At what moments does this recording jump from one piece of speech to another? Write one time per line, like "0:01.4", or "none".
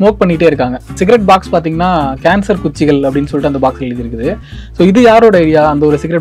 0:01.0

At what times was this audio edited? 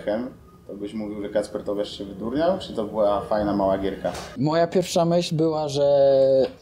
0:04.2

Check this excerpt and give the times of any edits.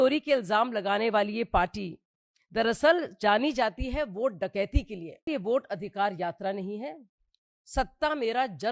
0:05.3

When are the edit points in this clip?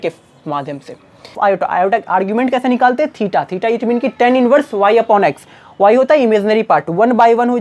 0:01.4

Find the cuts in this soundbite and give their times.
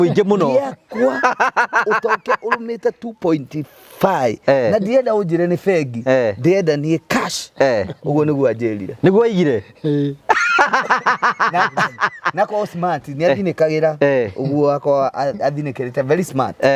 none

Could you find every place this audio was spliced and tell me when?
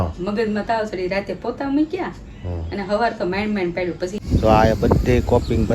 0:04.1

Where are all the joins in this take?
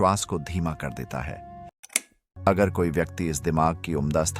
0:01.8

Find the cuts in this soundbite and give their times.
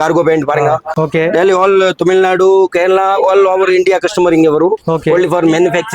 0:00.9

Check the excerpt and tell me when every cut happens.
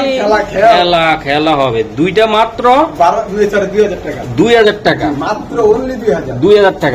none

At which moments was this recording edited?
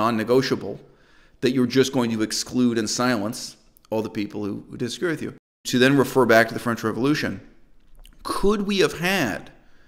0:05.6

